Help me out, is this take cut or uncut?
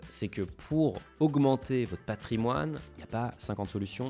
cut